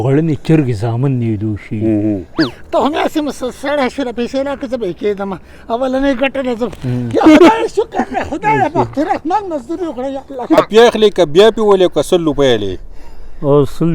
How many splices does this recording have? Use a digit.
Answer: 2